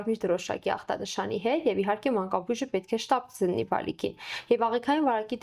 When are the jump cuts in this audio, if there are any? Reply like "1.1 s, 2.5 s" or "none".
none